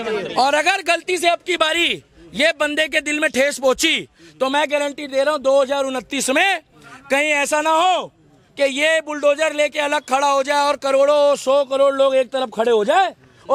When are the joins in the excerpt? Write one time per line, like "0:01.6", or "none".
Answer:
none